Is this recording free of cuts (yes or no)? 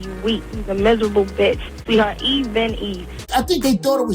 no